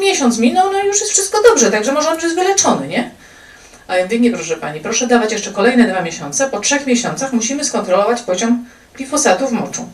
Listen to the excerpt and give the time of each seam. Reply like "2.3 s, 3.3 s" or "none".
none